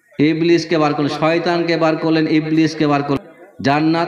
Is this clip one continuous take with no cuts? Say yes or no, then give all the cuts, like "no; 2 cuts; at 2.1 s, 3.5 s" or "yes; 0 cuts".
no; 1 cut; at 3.2 s